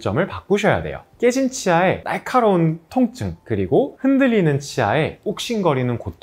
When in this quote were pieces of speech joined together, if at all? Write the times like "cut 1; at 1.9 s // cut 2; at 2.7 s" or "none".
cut 1; at 1.0 s